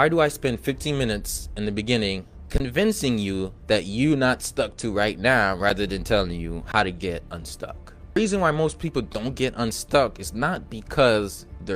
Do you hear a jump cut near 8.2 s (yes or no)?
yes